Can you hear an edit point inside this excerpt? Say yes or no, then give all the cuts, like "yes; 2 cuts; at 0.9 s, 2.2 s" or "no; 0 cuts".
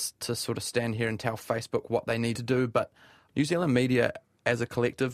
yes; 1 cut; at 2.9 s